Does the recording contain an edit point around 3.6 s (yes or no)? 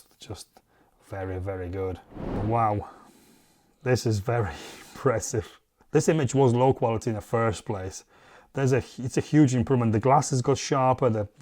no